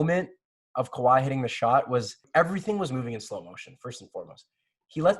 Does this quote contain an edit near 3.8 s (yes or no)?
no